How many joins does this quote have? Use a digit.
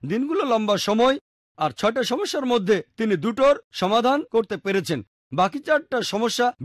0